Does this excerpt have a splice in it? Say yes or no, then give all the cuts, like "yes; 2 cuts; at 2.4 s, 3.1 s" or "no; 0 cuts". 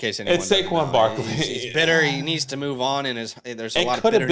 no; 0 cuts